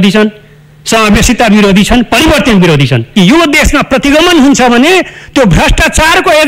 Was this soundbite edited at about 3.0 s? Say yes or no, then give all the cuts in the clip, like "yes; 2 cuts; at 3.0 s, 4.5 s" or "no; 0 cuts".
yes; 1 cut; at 3.0 s